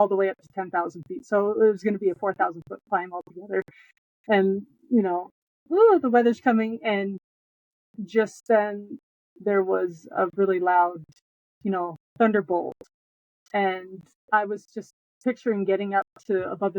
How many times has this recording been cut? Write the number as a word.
one